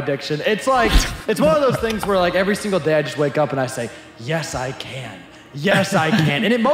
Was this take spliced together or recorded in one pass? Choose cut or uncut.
uncut